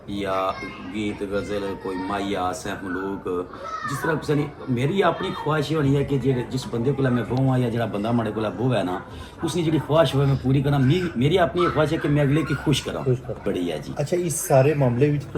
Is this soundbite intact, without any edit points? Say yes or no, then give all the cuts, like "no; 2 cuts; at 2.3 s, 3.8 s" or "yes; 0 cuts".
no; 1 cut; at 13.4 s